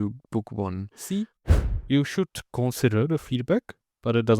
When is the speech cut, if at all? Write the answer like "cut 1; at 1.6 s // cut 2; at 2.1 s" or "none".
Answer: cut 1; at 1.6 s